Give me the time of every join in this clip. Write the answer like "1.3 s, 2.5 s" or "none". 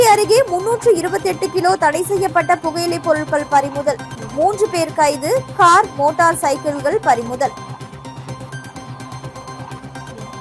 none